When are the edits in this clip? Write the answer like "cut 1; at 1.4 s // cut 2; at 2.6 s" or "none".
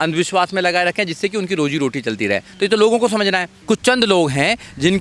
cut 1; at 3.5 s